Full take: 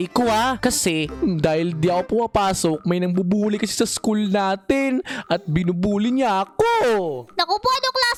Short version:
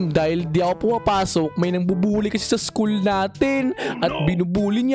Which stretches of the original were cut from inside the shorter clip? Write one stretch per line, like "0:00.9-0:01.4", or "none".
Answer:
none

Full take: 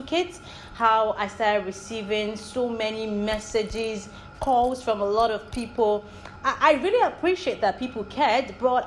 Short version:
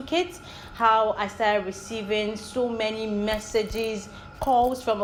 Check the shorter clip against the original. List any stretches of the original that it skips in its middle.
none

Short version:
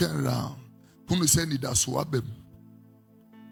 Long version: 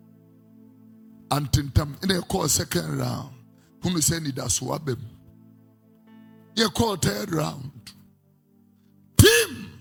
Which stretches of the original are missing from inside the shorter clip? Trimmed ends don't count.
none

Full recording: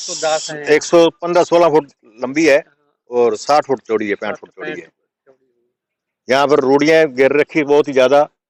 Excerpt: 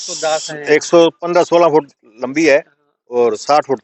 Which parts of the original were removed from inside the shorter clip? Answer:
none

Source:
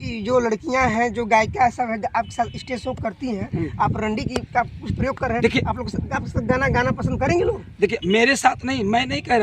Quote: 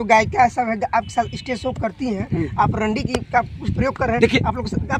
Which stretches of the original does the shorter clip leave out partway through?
none

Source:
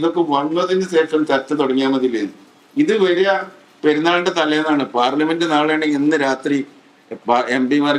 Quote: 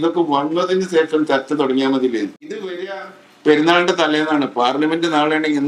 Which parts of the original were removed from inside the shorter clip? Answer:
0:02.7-0:03.1

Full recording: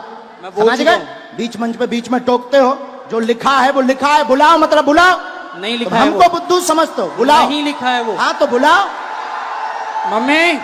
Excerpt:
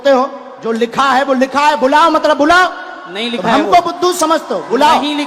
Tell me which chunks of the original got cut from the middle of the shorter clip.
none

